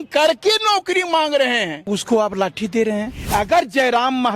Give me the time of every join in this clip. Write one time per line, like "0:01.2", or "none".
0:01.8
0:03.2